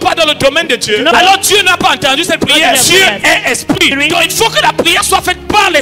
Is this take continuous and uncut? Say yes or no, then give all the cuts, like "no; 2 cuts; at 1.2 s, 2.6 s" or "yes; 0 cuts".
no; 3 cuts; at 1.1 s, 2.8 s, 3.9 s